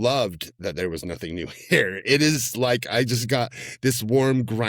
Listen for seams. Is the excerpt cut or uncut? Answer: uncut